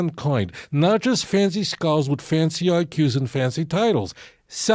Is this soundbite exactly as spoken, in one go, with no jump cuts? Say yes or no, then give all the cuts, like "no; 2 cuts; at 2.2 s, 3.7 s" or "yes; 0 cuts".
yes; 0 cuts